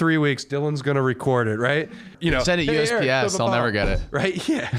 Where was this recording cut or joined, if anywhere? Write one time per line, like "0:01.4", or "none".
0:02.1